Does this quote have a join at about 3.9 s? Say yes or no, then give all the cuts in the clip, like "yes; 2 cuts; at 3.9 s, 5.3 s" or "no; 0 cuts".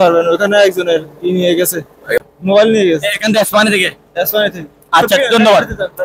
no; 1 cut; at 2.2 s